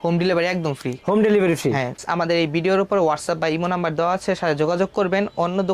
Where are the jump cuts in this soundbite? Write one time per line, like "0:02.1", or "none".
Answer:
0:02.0